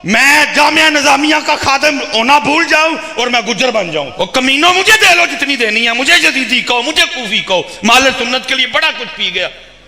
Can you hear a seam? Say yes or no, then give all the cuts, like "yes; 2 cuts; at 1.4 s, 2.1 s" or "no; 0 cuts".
yes; 1 cut; at 4.1 s